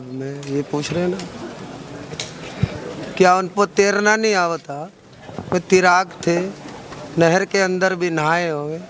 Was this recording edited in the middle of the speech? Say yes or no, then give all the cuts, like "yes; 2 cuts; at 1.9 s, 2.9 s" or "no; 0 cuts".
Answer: no; 0 cuts